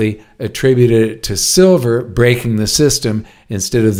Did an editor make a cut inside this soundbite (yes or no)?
no